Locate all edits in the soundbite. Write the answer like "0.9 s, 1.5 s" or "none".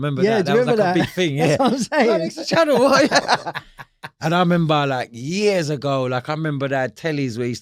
none